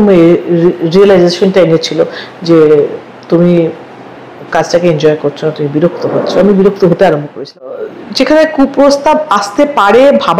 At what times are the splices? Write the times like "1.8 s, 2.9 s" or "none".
7.6 s